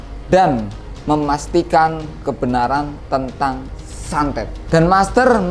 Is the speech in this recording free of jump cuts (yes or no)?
no